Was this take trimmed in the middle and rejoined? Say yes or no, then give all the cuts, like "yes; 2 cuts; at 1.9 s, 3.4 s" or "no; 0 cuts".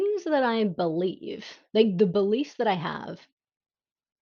no; 0 cuts